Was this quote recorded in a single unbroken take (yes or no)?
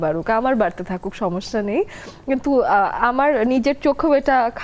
yes